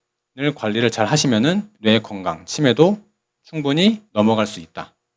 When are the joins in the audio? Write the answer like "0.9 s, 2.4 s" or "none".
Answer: 4.0 s